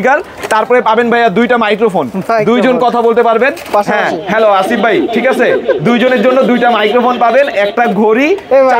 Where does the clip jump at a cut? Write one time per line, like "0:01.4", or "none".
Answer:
none